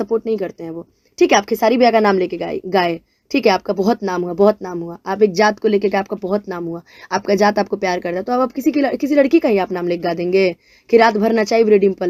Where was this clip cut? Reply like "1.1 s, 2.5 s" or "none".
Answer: none